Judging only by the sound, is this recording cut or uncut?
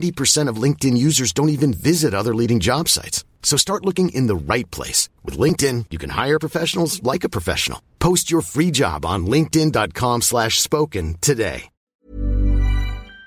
cut